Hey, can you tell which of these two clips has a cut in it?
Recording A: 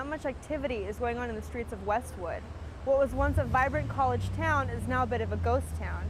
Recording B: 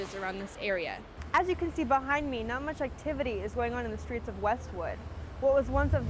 B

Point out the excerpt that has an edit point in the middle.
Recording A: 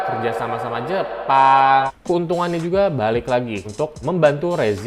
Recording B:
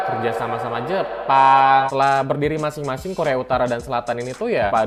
A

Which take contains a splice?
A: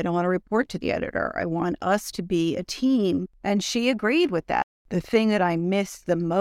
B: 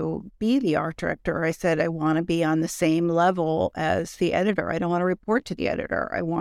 A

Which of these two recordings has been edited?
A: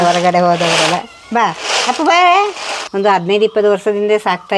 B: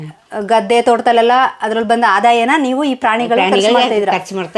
A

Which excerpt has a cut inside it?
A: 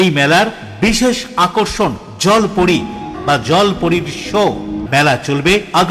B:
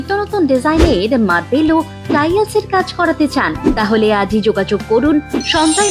A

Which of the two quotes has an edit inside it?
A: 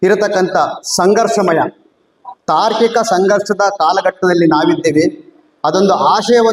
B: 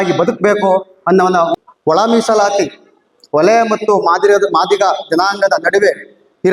B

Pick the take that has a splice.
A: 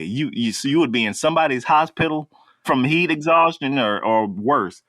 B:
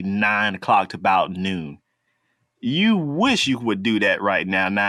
A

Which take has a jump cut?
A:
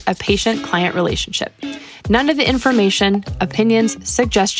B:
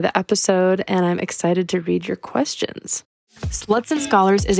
B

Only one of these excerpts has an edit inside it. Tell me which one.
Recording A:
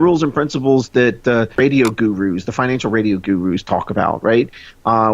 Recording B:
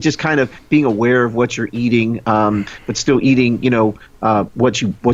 A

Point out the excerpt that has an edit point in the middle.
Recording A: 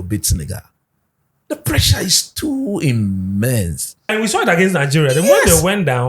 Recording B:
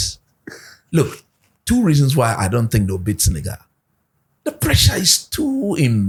A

